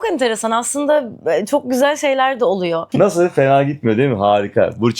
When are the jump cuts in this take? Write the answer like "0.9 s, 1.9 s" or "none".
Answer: 2.9 s